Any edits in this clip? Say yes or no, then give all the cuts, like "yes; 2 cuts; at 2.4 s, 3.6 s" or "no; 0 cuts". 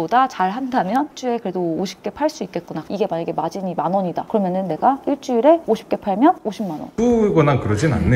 yes; 1 cut; at 6.9 s